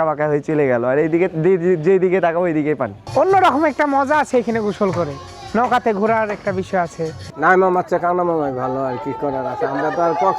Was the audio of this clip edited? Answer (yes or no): yes